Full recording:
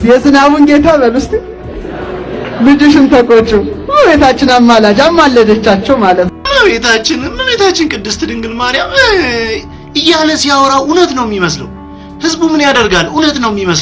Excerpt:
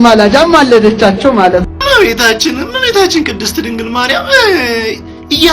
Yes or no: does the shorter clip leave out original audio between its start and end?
no